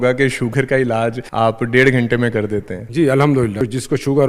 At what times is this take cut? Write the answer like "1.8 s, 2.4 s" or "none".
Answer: 1.2 s, 2.8 s, 3.6 s